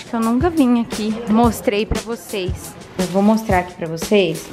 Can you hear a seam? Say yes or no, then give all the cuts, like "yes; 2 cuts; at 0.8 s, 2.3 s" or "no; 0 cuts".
yes; 1 cut; at 2.9 s